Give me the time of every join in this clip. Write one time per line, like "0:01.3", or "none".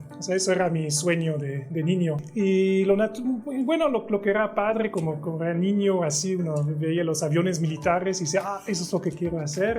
0:02.2